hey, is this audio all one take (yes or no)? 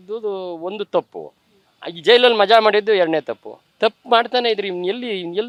yes